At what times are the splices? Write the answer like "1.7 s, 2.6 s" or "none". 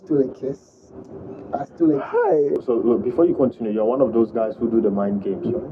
2.6 s